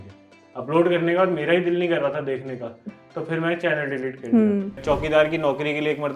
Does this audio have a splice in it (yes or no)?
yes